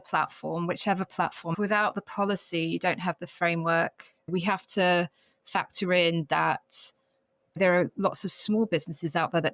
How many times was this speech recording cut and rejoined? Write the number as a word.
three